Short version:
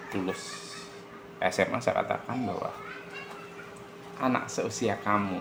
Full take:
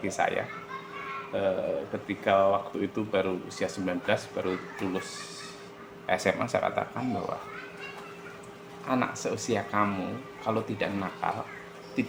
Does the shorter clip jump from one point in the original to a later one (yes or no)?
no